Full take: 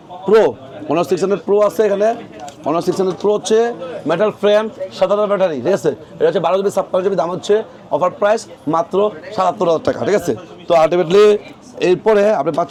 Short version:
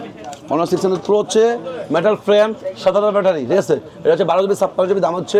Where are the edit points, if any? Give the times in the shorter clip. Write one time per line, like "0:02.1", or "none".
none